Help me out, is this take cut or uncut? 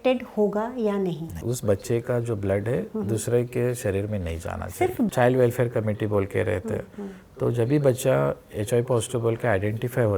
cut